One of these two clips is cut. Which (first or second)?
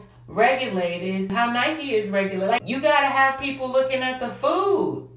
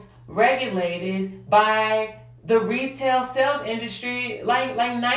first